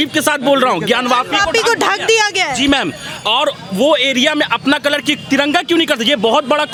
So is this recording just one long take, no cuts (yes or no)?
yes